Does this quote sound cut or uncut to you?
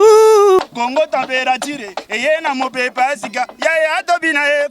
uncut